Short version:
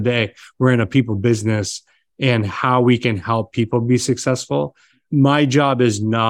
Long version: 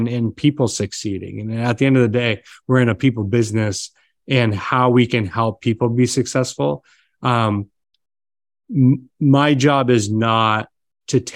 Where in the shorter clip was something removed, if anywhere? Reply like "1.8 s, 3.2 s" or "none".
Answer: 5.0 s